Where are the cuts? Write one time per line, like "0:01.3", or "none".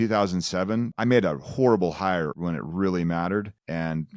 0:00.9
0:02.3